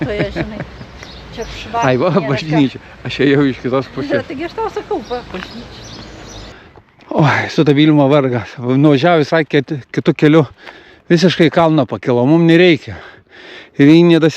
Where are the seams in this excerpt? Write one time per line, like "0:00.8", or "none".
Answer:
0:06.5